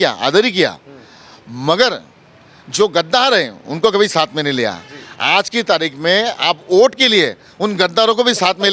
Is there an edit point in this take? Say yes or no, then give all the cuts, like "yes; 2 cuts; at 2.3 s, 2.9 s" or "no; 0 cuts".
no; 0 cuts